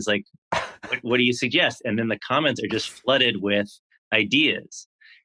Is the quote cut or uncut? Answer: uncut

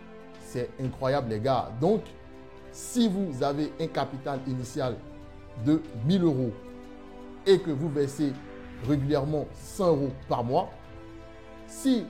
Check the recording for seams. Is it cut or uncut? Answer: uncut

